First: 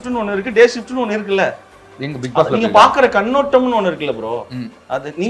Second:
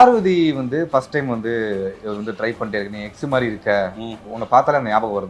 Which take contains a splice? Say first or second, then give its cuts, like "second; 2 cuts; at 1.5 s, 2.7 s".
second; 1 cut; at 4.3 s